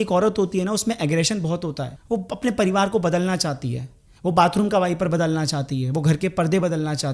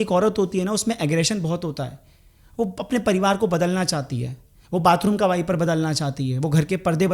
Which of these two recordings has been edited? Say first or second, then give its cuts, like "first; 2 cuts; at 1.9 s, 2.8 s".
first; 1 cut; at 1.9 s